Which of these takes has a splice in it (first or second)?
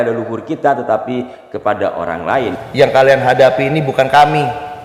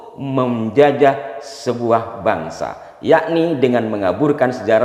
first